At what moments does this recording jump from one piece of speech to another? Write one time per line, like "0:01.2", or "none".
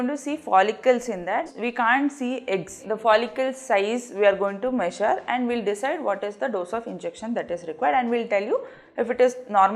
none